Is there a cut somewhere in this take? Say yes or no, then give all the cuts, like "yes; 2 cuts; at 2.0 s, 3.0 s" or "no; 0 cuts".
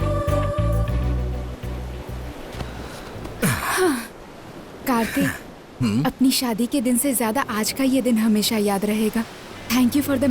yes; 1 cut; at 1.1 s